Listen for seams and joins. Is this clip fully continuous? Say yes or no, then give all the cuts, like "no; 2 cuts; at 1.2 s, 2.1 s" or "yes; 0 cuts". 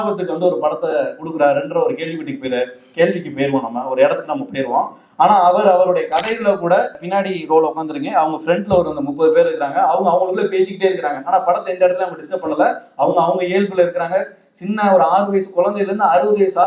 no; 1 cut; at 7.0 s